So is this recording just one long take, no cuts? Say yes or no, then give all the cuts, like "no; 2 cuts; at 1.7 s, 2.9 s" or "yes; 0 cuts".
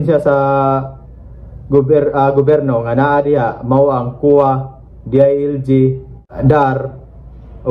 no; 1 cut; at 6.3 s